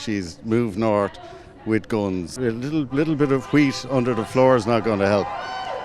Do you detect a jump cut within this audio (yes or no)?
yes